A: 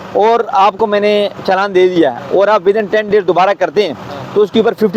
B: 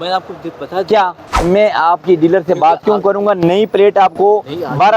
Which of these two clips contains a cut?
B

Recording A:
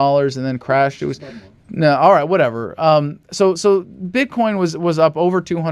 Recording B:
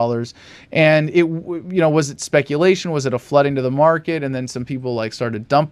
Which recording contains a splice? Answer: A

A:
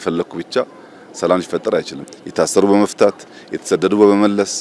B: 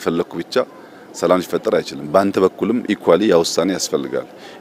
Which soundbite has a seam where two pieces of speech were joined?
A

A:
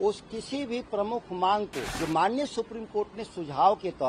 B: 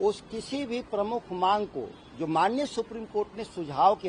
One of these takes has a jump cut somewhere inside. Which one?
A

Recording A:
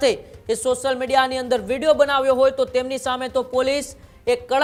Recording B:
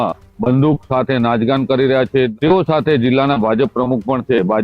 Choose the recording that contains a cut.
B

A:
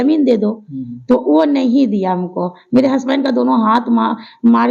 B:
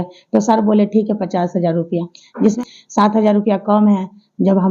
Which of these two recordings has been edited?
B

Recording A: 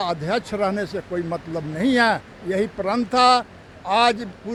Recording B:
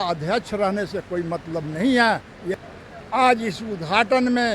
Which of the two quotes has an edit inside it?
B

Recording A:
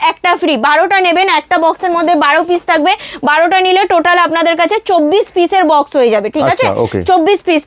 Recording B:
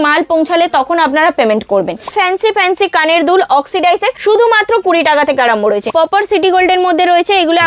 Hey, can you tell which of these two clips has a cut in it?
B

